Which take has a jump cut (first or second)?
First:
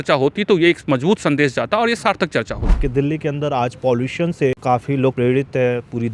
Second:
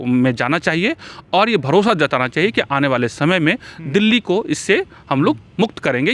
first